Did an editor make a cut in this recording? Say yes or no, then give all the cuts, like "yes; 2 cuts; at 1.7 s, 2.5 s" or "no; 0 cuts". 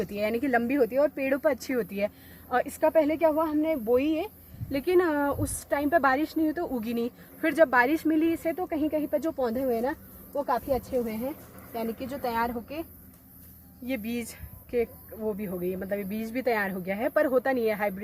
no; 0 cuts